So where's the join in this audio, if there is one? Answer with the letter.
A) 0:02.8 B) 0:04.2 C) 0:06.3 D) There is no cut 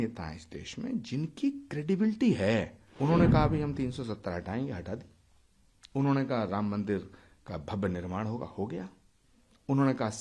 A